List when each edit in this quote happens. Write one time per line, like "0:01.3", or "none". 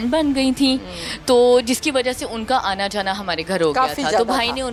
none

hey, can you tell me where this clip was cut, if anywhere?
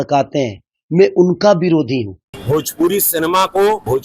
0:02.3

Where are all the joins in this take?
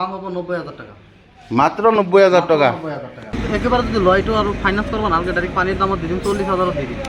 0:03.4

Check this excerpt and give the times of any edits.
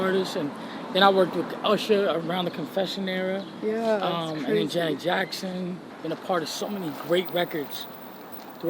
0:05.9

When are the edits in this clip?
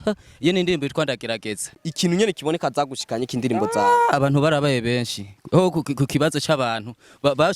0:01.8

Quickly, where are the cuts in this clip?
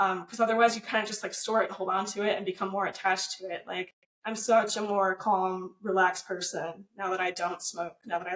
0:04.0

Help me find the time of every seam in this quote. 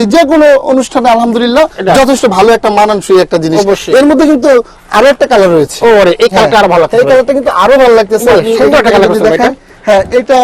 none

